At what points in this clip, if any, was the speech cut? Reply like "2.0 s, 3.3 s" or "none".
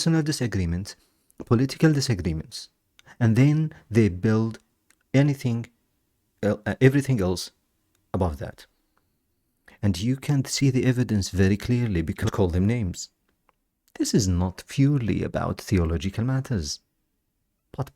12.2 s